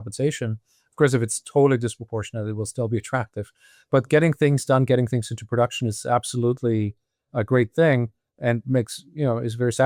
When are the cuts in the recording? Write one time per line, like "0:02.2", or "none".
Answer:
none